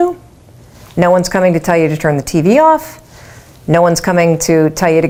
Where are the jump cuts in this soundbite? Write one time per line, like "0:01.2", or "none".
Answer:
none